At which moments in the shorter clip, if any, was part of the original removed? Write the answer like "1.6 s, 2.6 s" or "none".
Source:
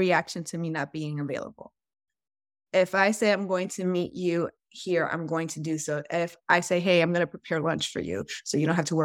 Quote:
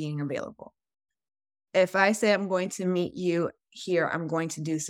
none